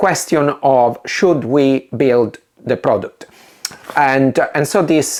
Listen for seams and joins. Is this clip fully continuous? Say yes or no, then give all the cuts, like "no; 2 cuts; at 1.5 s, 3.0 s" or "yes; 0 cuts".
yes; 0 cuts